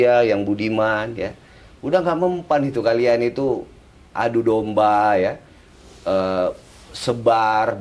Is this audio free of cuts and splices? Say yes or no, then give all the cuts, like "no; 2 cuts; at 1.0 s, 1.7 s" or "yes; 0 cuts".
yes; 0 cuts